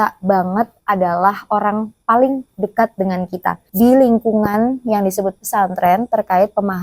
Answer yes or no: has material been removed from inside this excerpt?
yes